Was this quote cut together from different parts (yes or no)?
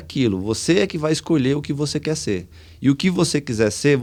no